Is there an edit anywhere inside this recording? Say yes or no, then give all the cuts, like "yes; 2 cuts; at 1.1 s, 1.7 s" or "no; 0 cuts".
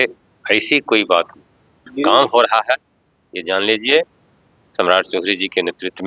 yes; 1 cut; at 1.8 s